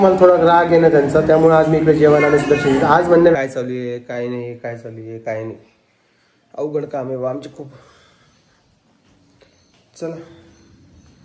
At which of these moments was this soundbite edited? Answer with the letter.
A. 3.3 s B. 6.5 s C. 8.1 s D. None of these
A